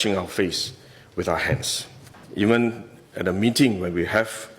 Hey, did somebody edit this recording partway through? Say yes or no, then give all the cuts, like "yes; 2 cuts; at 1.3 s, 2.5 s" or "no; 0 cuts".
yes; 1 cut; at 2.2 s